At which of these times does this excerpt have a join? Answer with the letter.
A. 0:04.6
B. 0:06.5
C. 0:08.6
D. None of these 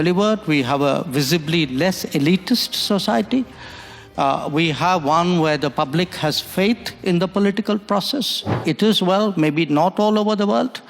C